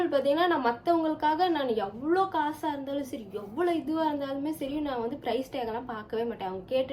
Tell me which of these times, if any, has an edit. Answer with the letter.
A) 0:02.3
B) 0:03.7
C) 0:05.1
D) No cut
D